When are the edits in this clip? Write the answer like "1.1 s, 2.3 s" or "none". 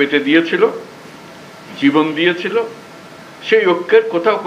none